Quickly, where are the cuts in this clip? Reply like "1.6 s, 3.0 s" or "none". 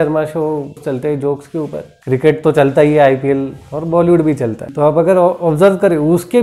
0.8 s, 1.9 s, 4.6 s